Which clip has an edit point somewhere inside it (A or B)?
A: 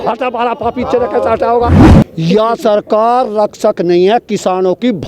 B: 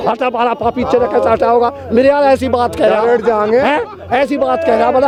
A